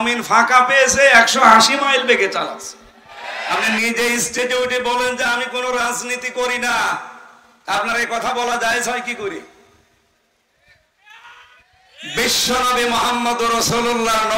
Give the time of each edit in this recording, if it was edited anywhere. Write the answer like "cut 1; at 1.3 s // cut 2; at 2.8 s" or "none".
cut 1; at 3.4 s